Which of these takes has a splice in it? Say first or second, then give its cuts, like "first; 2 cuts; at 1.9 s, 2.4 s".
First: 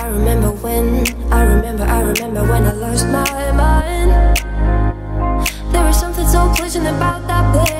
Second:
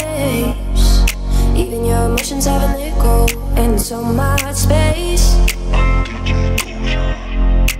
first; 1 cut; at 1.2 s